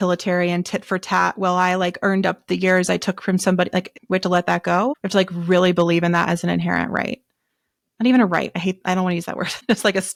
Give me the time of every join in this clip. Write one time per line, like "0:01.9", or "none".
none